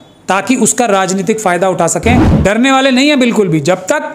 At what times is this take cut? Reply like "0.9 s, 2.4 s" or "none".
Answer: 2.3 s